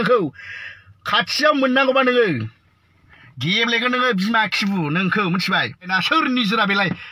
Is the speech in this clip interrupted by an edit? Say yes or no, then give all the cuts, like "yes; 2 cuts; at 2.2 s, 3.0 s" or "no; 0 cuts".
yes; 1 cut; at 6.0 s